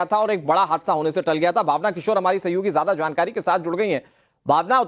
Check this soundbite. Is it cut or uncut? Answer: uncut